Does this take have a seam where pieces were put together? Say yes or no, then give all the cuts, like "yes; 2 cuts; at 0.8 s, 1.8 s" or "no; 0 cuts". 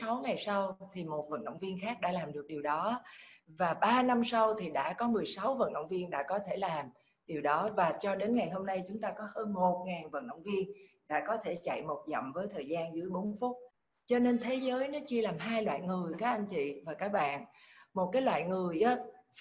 yes; 1 cut; at 13.7 s